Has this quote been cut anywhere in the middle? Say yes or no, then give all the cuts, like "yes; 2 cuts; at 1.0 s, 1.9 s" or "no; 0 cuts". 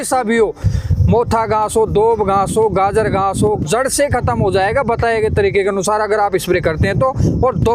yes; 1 cut; at 3.6 s